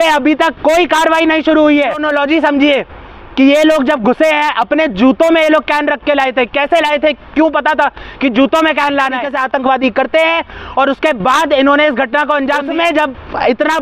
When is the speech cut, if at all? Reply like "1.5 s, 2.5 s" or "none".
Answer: 2.0 s, 9.3 s, 12.7 s